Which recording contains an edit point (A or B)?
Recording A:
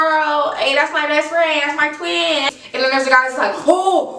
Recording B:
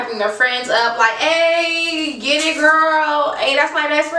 A